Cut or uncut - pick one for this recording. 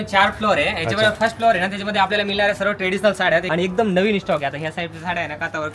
cut